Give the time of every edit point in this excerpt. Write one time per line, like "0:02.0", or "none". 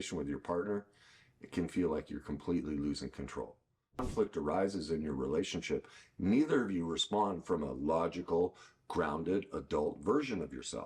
0:04.1